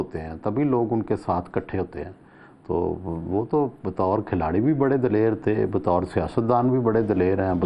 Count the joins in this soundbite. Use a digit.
0